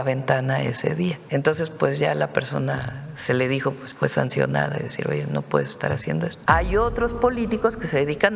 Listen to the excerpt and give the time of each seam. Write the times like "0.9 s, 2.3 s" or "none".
1.2 s, 3.9 s, 6.4 s